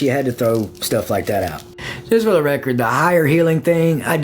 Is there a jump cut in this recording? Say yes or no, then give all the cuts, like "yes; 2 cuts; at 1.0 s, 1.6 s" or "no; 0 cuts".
yes; 1 cut; at 1.8 s